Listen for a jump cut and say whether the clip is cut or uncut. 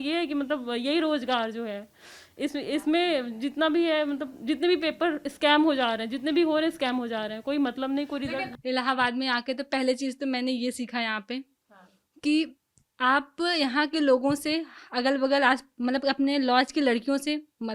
cut